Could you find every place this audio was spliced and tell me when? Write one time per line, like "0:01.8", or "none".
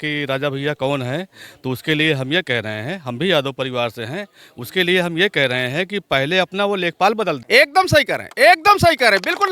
0:07.4

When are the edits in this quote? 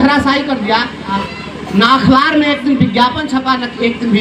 0:01.2

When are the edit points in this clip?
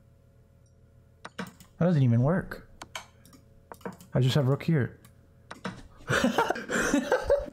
0:06.6

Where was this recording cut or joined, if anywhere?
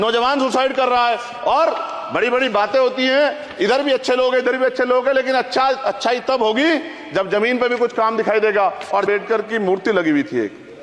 0:09.1

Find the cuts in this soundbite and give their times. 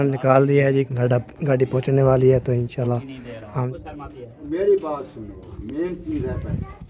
0:03.7

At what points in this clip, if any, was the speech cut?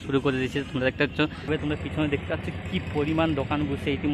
0:01.5

